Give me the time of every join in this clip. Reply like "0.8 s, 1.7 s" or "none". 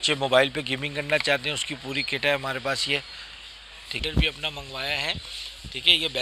4.0 s